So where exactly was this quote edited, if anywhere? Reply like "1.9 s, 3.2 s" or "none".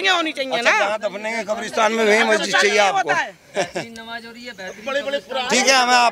none